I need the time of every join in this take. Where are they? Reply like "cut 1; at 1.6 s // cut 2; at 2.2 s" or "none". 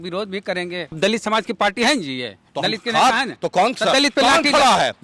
cut 1; at 1.0 s